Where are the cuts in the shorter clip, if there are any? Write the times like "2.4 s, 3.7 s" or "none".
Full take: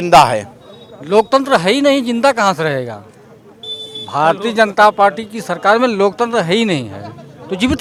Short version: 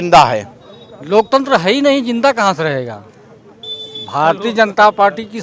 none